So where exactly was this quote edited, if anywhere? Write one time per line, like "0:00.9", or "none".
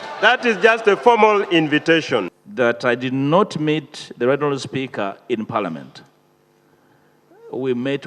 0:02.4